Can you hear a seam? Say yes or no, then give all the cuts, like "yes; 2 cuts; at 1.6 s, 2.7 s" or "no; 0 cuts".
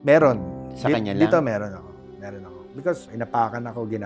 yes; 1 cut; at 3.0 s